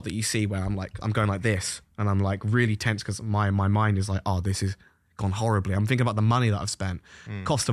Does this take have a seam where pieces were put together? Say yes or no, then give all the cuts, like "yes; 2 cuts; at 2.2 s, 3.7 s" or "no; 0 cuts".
no; 0 cuts